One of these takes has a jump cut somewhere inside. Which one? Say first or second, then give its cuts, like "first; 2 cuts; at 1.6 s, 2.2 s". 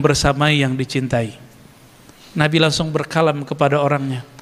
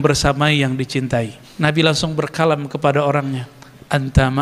second; 1 cut; at 1.4 s